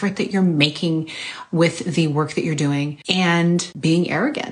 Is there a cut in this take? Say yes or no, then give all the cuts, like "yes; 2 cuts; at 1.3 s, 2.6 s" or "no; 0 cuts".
yes; 2 cuts; at 3.0 s, 3.7 s